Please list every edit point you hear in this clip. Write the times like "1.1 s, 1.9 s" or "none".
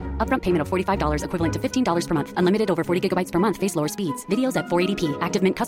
none